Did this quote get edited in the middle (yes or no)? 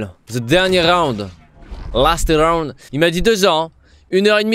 no